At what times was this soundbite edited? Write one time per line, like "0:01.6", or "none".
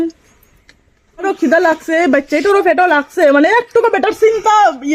0:01.2